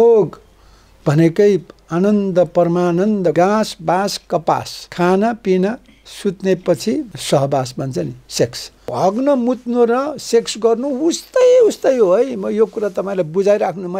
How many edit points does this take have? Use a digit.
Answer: 4